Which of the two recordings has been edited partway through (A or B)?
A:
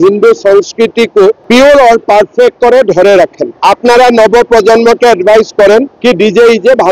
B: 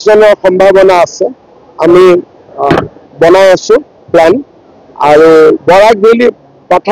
A